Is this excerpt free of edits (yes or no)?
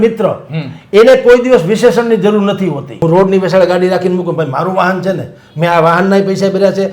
no